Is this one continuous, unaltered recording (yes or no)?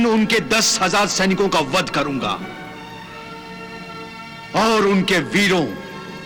yes